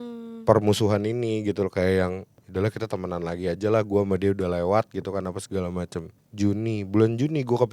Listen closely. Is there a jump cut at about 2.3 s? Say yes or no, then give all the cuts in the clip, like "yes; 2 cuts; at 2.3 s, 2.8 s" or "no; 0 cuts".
yes; 2 cuts; at 2.3 s, 6.2 s